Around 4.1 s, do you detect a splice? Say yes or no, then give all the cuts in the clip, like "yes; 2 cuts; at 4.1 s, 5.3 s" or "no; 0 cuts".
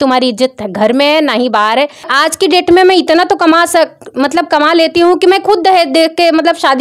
no; 1 cut; at 2.1 s